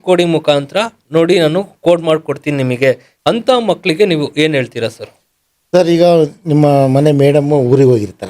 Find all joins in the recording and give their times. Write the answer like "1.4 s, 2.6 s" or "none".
3.1 s